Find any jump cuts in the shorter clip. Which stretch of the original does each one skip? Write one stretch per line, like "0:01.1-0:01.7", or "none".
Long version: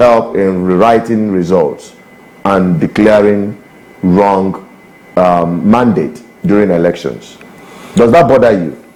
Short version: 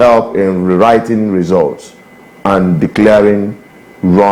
none